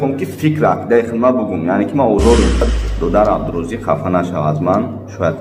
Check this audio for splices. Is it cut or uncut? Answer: cut